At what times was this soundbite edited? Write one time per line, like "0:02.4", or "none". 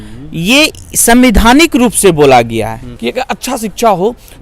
0:02.9